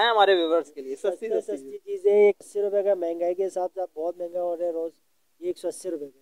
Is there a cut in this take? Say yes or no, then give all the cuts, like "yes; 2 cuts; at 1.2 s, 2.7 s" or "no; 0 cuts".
yes; 1 cut; at 2.4 s